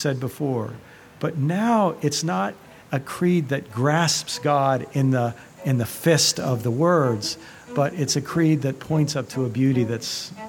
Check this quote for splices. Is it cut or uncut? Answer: uncut